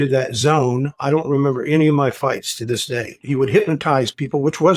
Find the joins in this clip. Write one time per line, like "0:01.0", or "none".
0:01.0
0:03.2